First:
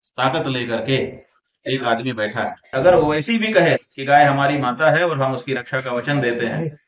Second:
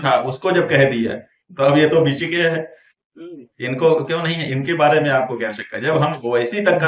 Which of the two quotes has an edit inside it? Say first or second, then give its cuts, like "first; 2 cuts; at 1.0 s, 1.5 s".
first; 1 cut; at 2.7 s